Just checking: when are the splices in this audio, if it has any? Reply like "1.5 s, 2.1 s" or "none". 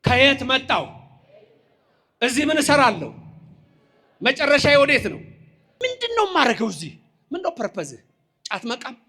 5.6 s